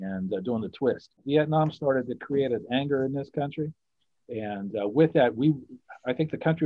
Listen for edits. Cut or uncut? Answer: cut